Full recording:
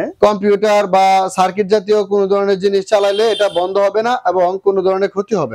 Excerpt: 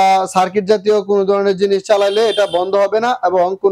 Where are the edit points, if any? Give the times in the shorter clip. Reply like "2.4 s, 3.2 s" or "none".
none